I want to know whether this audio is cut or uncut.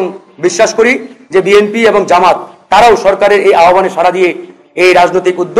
uncut